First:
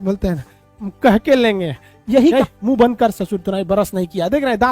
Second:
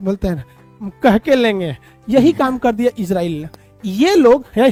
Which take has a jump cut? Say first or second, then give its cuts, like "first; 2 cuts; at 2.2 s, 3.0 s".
first; 1 cut; at 2.3 s